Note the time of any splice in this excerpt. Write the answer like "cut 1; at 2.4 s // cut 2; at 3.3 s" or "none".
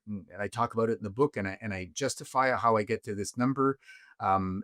none